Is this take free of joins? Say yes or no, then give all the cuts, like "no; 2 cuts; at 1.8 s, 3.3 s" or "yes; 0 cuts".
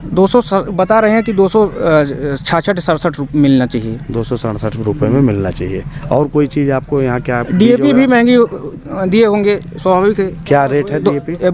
yes; 0 cuts